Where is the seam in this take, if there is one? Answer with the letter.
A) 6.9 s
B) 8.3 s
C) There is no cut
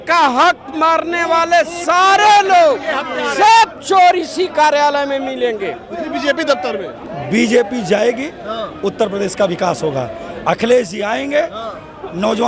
A